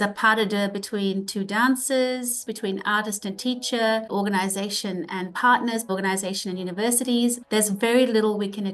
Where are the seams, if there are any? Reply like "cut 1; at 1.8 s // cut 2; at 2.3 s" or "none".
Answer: cut 1; at 2.5 s // cut 2; at 4.1 s // cut 3; at 5.9 s // cut 4; at 7.4 s